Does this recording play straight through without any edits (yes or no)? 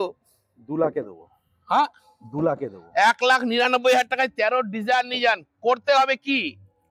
yes